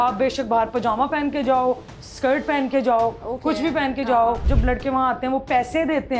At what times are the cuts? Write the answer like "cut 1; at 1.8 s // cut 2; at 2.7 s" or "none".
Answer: cut 1; at 4.5 s